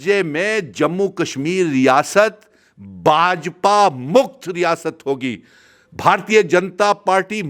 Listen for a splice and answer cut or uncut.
uncut